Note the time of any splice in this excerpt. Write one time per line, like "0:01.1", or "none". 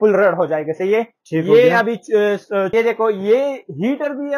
0:02.7